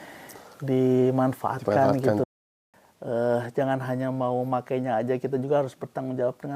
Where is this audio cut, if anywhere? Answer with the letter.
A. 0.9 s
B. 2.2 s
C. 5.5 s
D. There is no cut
B